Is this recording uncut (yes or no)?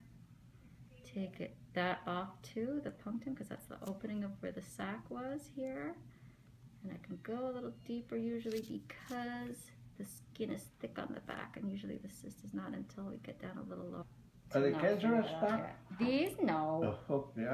yes